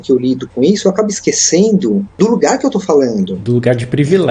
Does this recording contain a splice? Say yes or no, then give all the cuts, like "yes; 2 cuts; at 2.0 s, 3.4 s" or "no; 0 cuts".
yes; 1 cut; at 2.1 s